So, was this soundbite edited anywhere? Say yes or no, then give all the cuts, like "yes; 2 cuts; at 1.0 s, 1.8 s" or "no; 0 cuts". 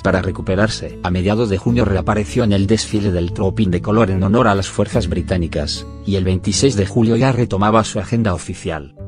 yes; 1 cut; at 5.1 s